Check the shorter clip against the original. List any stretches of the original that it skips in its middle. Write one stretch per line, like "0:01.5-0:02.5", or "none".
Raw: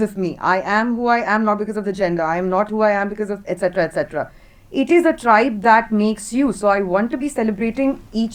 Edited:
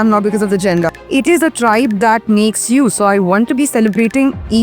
0:02.2-0:04.5